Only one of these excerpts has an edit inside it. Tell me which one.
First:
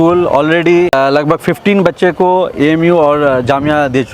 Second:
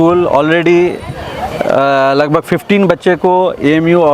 first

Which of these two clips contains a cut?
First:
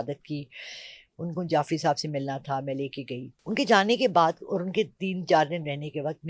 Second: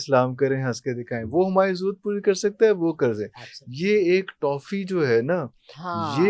first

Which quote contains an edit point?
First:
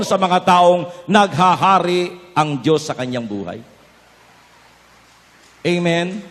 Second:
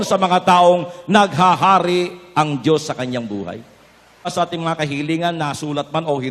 second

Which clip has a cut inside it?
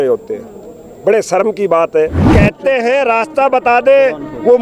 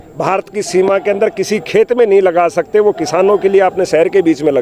first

